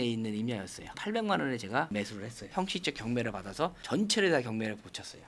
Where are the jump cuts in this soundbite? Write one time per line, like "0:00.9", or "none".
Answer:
0:01.0
0:02.5